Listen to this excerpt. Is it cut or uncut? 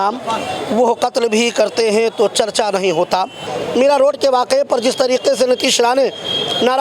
cut